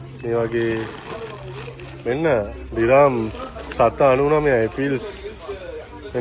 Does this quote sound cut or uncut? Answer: uncut